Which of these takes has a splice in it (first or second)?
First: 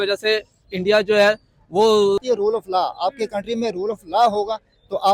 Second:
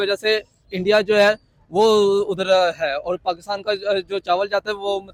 first